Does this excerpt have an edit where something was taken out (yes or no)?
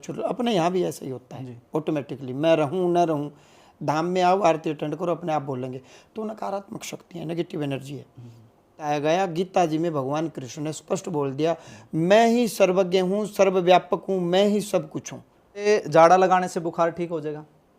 yes